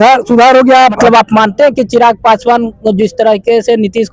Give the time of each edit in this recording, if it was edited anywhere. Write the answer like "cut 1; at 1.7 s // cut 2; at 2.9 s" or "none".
cut 1; at 1.0 s

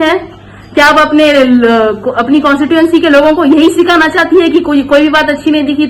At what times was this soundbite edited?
none

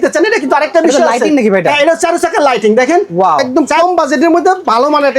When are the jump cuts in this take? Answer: cut 1; at 3.5 s

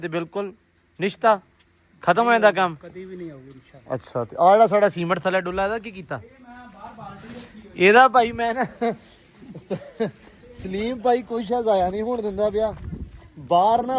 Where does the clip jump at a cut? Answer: none

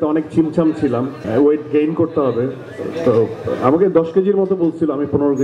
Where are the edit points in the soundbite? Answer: cut 1; at 1.2 s

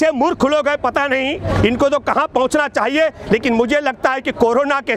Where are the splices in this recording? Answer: none

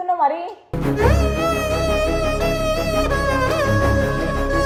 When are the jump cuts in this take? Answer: none

